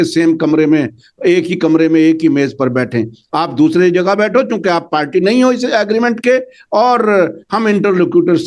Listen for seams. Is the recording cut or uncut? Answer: uncut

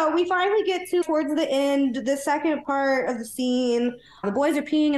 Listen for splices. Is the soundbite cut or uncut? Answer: cut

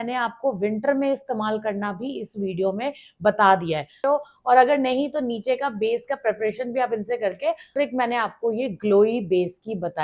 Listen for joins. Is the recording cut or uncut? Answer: cut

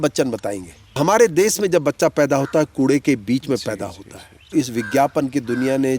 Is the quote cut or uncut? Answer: cut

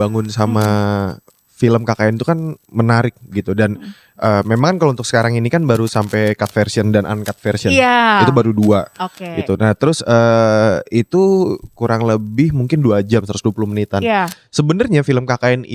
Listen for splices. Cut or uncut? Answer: uncut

